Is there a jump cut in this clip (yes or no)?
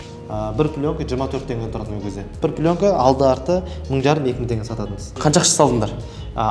yes